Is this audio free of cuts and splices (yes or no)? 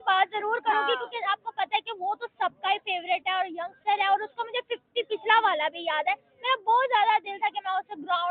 yes